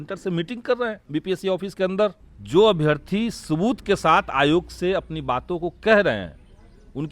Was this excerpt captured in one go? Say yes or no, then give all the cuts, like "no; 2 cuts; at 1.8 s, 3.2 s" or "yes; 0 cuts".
no; 2 cuts; at 1.0 s, 2.3 s